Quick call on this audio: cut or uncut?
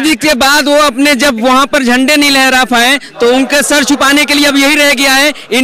uncut